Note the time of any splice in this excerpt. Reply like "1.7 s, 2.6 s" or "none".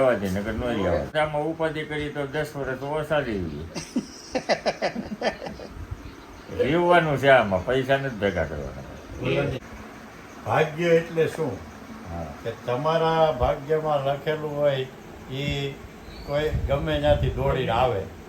1.1 s, 9.6 s